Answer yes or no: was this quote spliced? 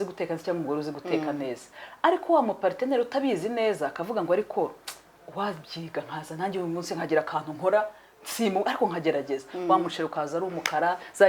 no